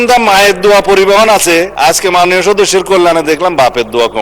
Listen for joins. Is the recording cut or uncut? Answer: cut